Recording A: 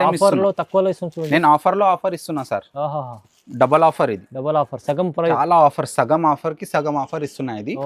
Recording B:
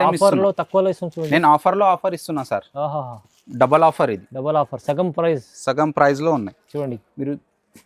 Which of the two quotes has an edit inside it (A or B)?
A